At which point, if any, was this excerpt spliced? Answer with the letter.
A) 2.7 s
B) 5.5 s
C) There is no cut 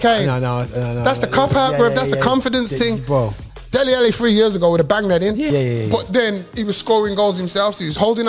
B